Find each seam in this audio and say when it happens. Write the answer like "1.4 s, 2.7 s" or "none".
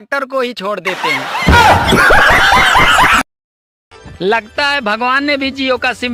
none